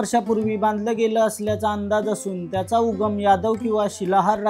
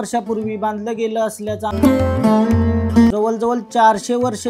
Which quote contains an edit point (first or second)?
second